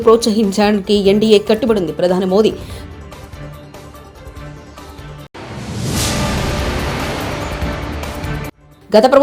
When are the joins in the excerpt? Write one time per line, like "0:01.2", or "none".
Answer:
none